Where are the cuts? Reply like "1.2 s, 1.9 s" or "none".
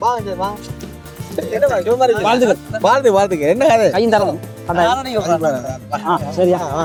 none